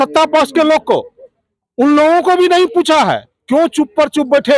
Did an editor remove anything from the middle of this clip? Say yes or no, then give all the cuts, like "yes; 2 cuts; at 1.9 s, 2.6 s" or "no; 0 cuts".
no; 0 cuts